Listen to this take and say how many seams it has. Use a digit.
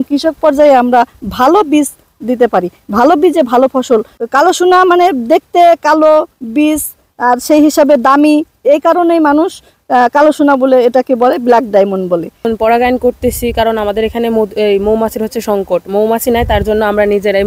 2